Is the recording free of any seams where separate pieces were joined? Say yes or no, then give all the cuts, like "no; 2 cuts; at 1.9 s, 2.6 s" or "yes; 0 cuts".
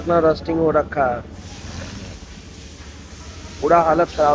yes; 0 cuts